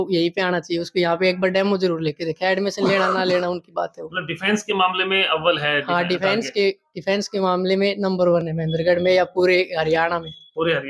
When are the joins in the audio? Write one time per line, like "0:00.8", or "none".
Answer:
none